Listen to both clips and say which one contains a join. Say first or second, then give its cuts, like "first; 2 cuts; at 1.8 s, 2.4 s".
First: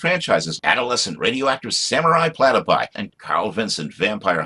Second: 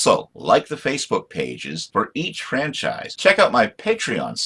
second; 1 cut; at 3.1 s